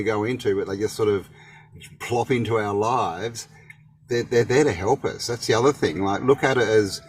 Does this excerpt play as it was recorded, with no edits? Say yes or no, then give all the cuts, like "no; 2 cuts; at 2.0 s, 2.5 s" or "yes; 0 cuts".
yes; 0 cuts